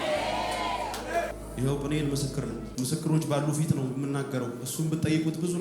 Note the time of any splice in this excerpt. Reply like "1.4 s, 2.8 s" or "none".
1.4 s, 2.7 s